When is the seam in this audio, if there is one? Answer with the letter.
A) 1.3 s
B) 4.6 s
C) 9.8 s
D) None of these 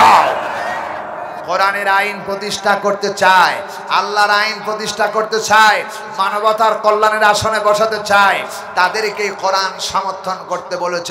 A